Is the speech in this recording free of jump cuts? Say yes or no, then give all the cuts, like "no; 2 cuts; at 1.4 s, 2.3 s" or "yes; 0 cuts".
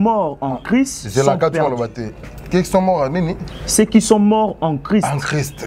yes; 0 cuts